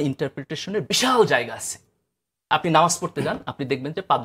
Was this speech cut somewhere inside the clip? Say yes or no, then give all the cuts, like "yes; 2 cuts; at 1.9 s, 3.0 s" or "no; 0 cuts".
no; 0 cuts